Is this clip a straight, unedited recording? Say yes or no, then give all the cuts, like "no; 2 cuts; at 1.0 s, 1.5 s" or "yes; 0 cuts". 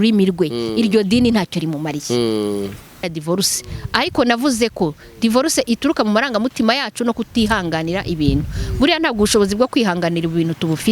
no; 1 cut; at 3.0 s